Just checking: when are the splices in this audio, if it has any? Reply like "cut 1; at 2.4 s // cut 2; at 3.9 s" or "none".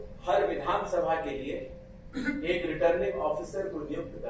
none